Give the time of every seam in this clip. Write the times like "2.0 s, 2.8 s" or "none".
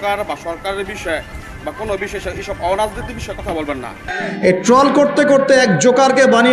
4.1 s